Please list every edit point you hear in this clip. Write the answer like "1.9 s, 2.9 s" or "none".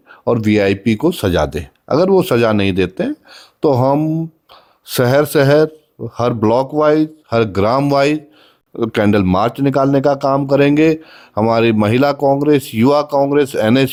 none

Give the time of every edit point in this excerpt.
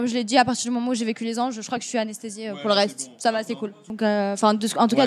3.8 s

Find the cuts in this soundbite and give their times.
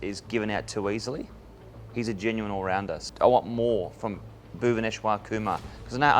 3.0 s

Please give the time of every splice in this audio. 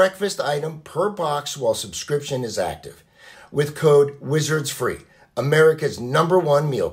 3.3 s

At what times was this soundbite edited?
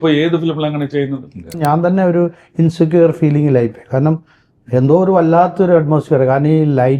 1.6 s

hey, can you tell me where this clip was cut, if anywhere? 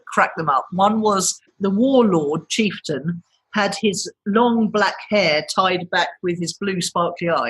1.5 s

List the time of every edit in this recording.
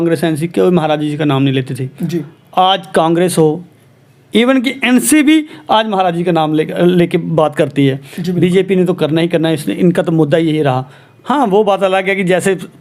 none

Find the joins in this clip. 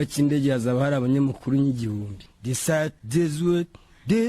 2.2 s

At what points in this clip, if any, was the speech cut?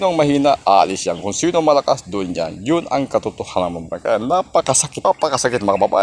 5.0 s

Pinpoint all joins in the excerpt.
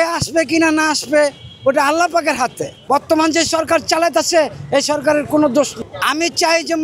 2.8 s

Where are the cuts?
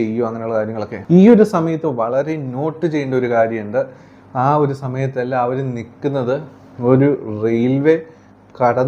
0.9 s

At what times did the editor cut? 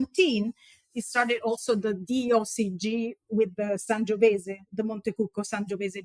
none

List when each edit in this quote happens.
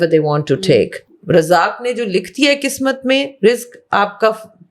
1.2 s

